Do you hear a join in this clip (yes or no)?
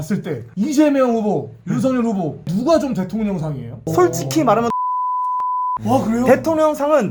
no